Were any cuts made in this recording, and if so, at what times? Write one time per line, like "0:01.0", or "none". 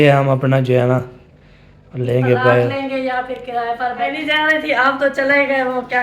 0:04.2